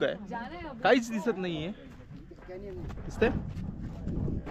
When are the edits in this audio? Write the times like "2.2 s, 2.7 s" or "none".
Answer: none